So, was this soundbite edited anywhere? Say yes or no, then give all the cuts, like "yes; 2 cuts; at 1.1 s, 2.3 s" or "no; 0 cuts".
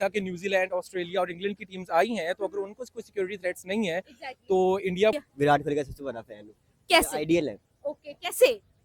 yes; 1 cut; at 5.2 s